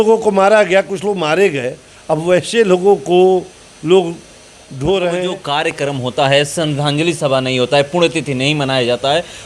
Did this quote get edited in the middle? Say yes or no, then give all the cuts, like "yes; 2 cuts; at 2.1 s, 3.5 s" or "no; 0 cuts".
yes; 1 cut; at 5.4 s